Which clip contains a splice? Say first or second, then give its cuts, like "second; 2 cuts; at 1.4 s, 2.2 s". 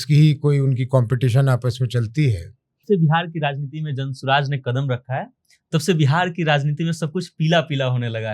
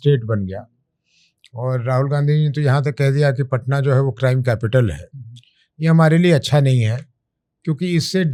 first; 1 cut; at 2.8 s